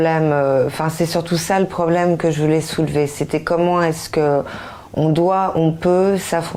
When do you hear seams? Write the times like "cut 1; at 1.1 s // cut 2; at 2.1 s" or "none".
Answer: none